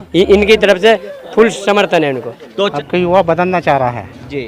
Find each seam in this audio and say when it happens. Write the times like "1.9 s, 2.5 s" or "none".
2.7 s